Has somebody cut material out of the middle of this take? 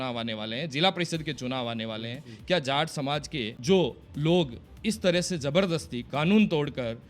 yes; 1 cut; at 3.5 s

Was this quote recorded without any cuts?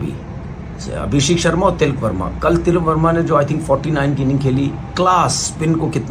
yes; 0 cuts

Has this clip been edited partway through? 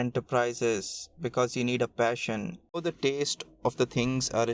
yes; 1 cut; at 2.8 s

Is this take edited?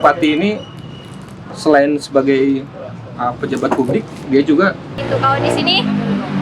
yes; 1 cut; at 5.0 s

